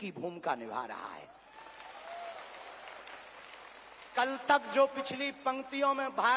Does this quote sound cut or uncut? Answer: uncut